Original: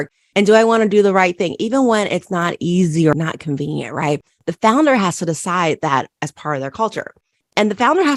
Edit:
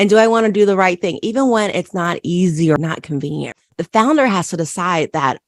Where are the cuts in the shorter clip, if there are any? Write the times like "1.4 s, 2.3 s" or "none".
3.6 s